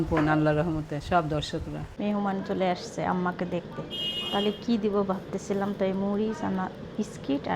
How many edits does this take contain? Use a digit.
1